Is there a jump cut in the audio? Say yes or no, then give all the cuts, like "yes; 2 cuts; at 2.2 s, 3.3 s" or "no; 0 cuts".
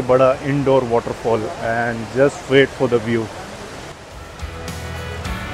no; 0 cuts